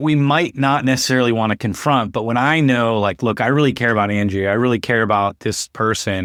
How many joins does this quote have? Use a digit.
0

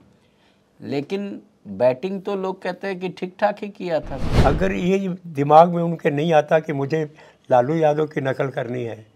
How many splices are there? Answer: 1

